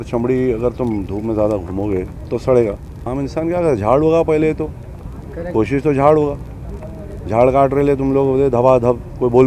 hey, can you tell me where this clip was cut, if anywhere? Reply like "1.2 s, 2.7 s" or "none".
2.9 s

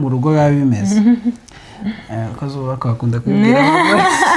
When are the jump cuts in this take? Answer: none

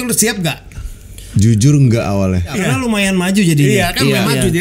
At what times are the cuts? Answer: 2.6 s

